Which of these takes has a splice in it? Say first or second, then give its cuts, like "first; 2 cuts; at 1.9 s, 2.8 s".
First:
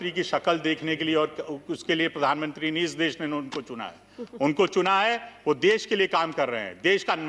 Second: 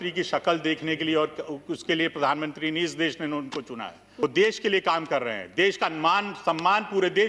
second; 1 cut; at 4.2 s